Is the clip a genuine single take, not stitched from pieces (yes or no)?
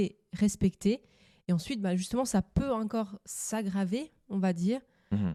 yes